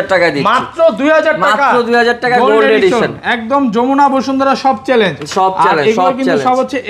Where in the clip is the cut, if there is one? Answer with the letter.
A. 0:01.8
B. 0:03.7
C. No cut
C